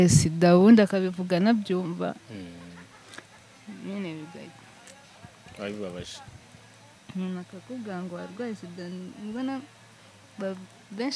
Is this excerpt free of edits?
yes; 0 cuts

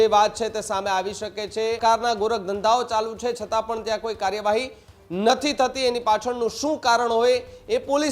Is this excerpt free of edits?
no; 1 cut; at 1.8 s

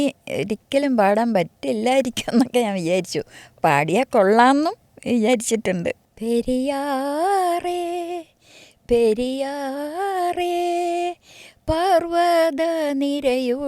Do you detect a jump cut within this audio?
yes; 1 cut; at 6.0 s

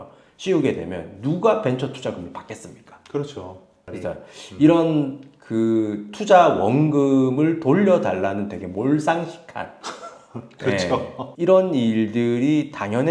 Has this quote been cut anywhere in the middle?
yes; 1 cut; at 3.8 s

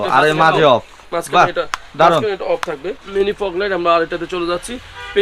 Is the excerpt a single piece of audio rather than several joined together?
yes; 0 cuts

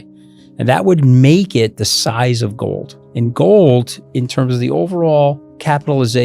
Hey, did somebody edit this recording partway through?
yes; 2 cuts; at 3.0 s, 4.0 s

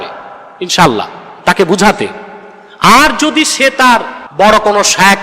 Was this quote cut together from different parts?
yes; 1 cut; at 4.3 s

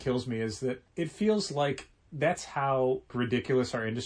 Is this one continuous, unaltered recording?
no; 2 cuts; at 0.8 s, 3.1 s

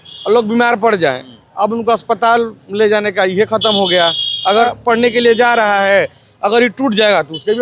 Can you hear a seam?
yes; 1 cut; at 4.7 s

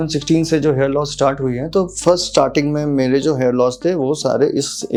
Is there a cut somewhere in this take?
no; 0 cuts

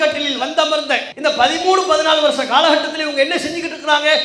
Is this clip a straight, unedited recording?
no; 1 cut; at 1.1 s

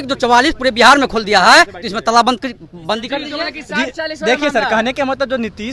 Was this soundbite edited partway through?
no; 0 cuts

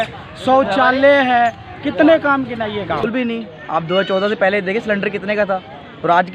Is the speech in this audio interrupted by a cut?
yes; 1 cut; at 3.0 s

